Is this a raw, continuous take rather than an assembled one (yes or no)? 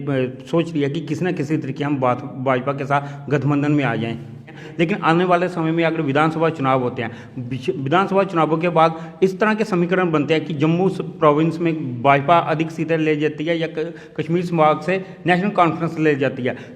no